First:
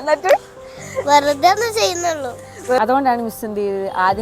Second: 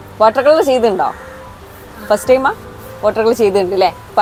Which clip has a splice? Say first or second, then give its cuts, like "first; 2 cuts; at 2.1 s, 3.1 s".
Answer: first; 1 cut; at 2.8 s